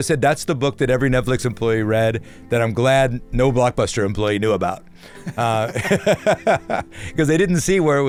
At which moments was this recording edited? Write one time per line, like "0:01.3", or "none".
none